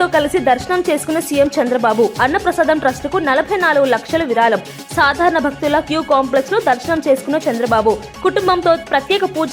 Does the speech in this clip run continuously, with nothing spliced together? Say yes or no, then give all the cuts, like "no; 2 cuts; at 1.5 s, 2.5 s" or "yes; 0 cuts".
yes; 0 cuts